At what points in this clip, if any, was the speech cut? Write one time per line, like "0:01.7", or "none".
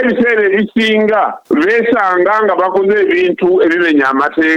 0:01.4